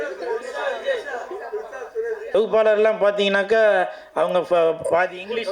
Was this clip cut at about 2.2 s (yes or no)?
yes